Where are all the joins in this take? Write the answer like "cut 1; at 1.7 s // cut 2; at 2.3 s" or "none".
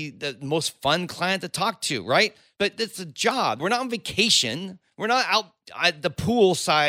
cut 1; at 2.4 s // cut 2; at 3.6 s // cut 3; at 5.6 s